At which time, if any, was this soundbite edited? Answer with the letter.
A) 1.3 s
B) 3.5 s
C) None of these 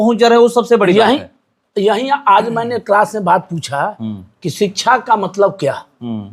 C